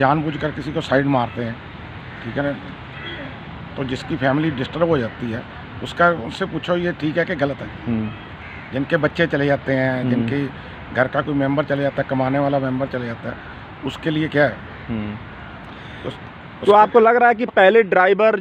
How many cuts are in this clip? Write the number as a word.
zero